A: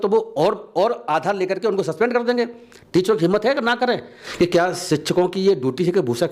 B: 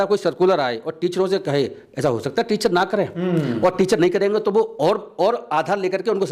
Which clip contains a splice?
A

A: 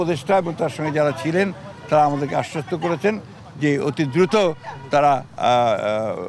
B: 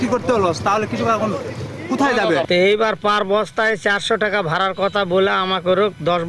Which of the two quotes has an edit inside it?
B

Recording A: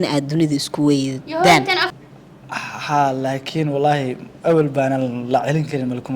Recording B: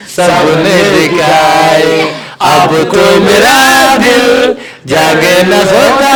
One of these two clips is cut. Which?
A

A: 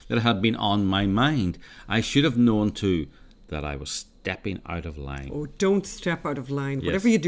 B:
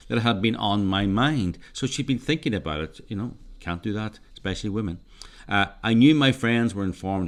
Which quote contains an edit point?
A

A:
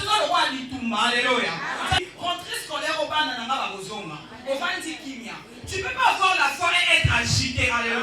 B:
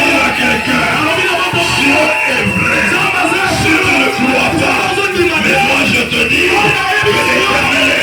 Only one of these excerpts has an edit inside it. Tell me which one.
A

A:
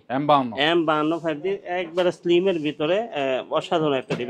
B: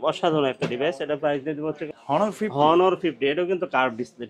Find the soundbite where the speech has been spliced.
B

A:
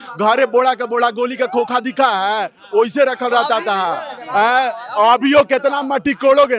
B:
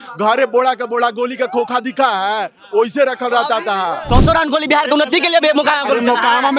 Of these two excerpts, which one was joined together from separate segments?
B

